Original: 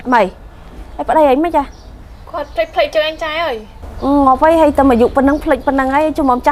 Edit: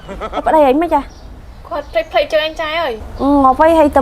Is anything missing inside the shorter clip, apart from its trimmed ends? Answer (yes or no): yes